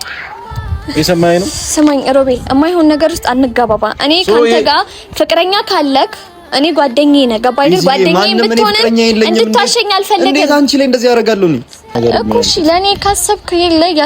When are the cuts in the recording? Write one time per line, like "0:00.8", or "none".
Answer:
0:12.0